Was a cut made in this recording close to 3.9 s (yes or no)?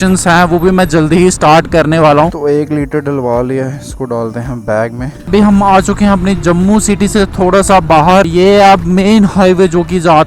no